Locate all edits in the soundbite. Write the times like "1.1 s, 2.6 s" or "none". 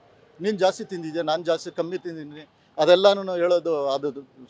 none